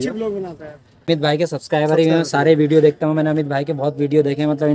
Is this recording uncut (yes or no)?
no